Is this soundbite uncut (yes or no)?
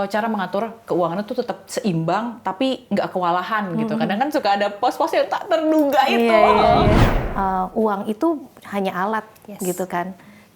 no